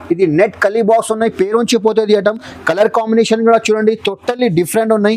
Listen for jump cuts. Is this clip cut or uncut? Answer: uncut